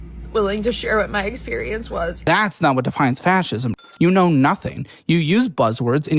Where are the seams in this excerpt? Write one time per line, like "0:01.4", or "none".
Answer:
0:02.2
0:03.8